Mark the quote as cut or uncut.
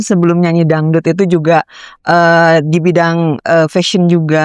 uncut